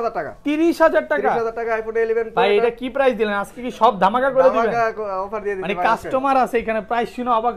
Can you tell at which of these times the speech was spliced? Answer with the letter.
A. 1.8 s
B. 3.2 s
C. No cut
C